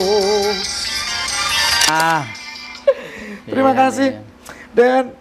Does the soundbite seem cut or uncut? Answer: uncut